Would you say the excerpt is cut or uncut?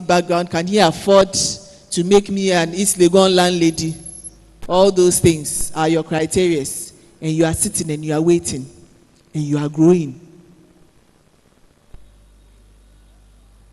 uncut